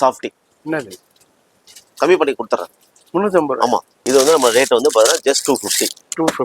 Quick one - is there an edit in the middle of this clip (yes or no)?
yes